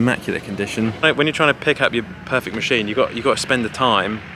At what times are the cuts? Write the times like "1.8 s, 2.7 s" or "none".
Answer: 1.0 s